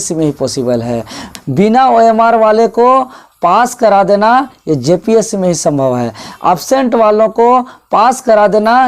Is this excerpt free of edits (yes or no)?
no